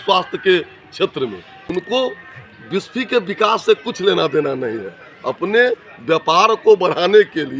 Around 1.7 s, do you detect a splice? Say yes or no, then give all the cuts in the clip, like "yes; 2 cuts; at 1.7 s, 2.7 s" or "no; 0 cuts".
yes; 1 cut; at 1.7 s